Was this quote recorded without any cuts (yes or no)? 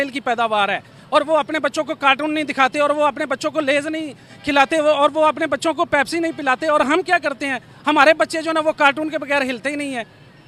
yes